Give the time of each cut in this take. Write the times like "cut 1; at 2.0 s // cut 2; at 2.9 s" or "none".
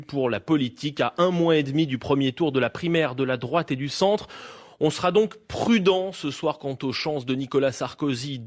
cut 1; at 2.8 s